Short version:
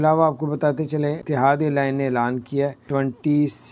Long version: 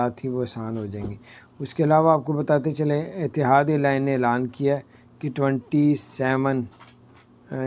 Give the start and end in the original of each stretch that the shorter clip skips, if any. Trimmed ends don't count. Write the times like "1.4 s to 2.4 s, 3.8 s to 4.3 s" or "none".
3.1 s to 3.3 s, 4.9 s to 5.3 s